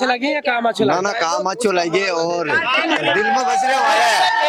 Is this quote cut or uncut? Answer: uncut